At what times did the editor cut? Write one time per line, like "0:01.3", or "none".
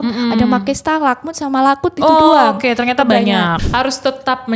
0:03.6